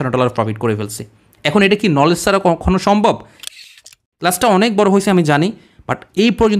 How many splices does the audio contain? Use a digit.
1